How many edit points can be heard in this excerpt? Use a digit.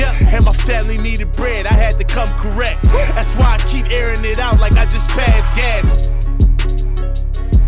0